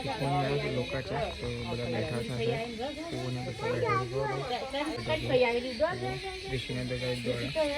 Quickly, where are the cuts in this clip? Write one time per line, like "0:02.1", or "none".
0:05.0